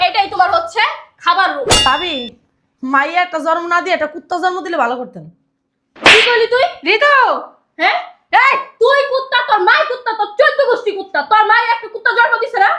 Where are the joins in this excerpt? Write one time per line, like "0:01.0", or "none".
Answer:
0:01.9